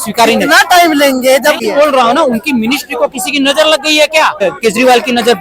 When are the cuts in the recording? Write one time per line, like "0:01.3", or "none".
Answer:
0:01.6
0:04.4